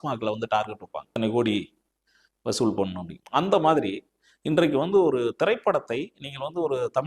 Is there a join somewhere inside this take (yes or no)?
yes